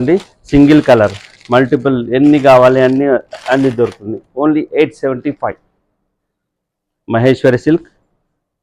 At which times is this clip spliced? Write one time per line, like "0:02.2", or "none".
none